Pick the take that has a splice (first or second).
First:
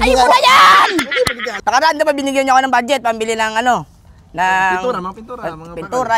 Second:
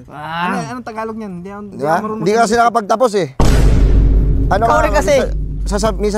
first